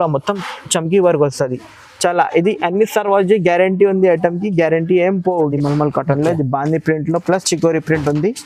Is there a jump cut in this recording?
yes; 1 cut; at 5.4 s

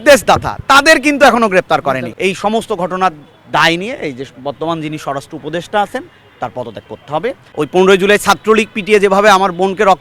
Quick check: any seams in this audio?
yes; 2 cuts; at 2.1 s, 7.4 s

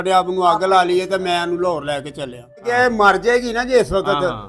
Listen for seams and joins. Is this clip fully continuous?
no; 1 cut; at 2.6 s

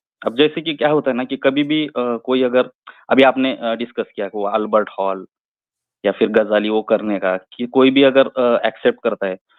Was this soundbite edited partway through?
no; 0 cuts

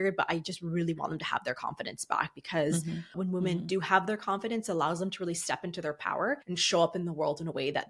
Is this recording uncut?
no; 2 cuts; at 3.1 s, 6.5 s

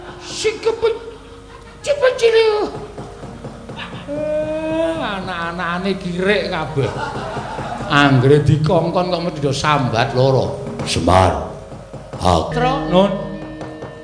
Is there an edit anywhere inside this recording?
yes; 1 cut; at 12.5 s

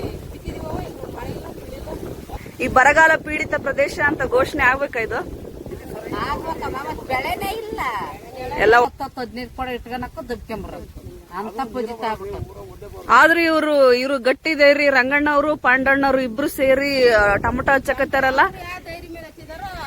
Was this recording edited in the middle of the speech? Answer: yes; 3 cuts; at 2.4 s, 5.8 s, 8.8 s

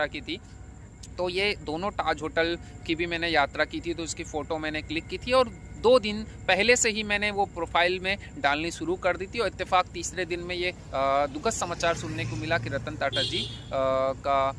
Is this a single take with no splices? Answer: yes; 0 cuts

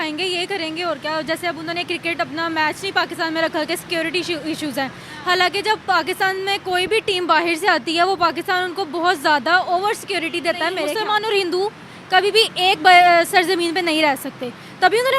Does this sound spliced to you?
yes; 1 cut; at 10.9 s

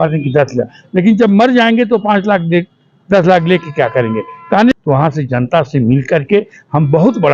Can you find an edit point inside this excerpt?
yes; 1 cut; at 4.7 s

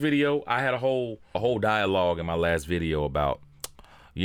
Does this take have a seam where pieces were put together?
no; 0 cuts

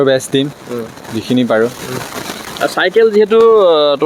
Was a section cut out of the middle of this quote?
no; 0 cuts

